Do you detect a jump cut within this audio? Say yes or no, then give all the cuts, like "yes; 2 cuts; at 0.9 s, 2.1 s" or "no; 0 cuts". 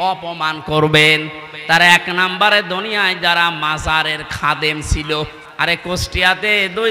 yes; 1 cut; at 5.4 s